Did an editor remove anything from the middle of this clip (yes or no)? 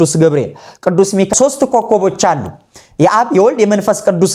yes